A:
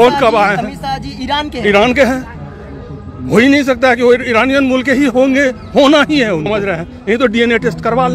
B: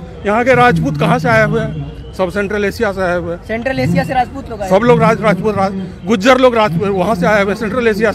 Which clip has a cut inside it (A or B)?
A